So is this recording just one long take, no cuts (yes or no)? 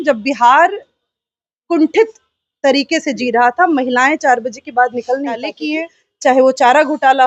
no